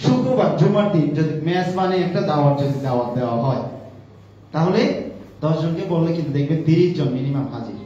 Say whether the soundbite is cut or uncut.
uncut